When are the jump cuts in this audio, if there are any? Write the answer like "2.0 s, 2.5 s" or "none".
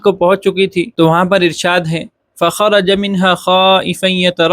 0.9 s